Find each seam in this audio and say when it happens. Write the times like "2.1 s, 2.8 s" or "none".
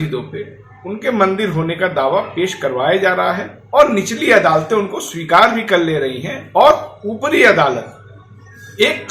none

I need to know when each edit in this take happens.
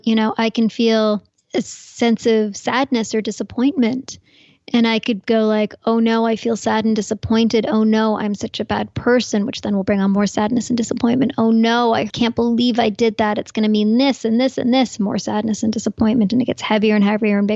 1.4 s, 12.1 s

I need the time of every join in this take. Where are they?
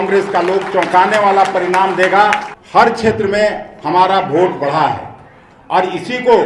2.5 s

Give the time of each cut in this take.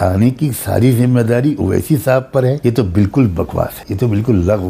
2.6 s, 3.8 s

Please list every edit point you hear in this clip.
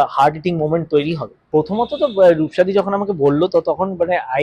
1.4 s

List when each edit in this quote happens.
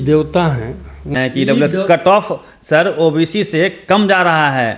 1.1 s

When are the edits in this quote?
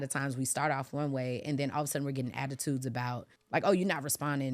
3.3 s

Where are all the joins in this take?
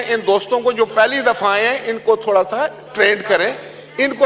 none

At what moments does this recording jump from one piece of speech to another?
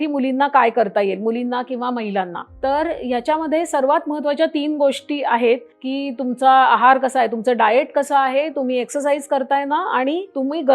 none

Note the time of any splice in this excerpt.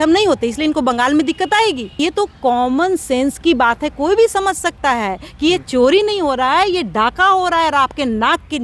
2.0 s

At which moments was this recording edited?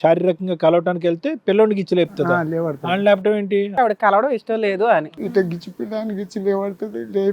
3.7 s, 5.1 s

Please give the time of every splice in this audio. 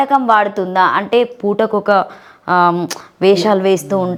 none

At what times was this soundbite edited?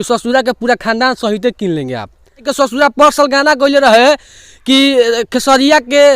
2.5 s

